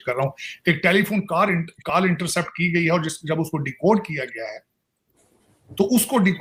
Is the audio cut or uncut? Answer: uncut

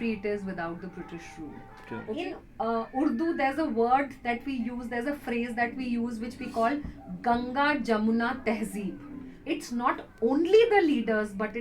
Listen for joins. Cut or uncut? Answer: cut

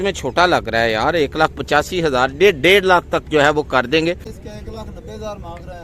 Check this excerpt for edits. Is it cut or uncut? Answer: cut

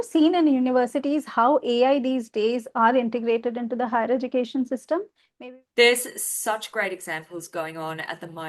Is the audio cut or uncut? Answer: cut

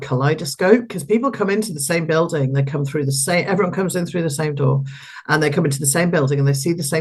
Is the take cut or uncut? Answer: uncut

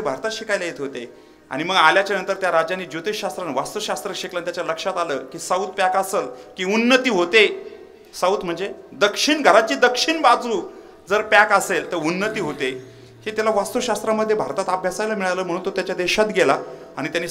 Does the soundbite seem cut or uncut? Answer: uncut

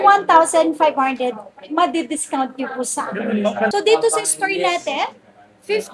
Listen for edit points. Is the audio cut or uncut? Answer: cut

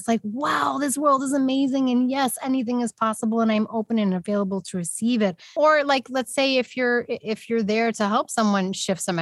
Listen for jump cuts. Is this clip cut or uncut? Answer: cut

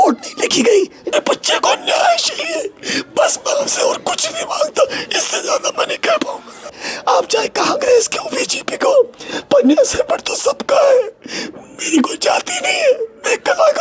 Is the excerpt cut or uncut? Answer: cut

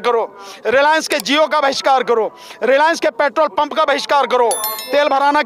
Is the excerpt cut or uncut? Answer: uncut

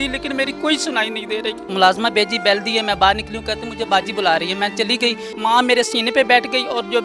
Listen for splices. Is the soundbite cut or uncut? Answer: cut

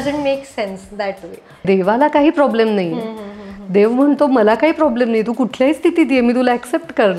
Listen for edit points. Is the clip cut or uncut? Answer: cut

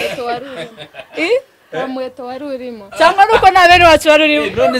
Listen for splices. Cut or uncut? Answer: uncut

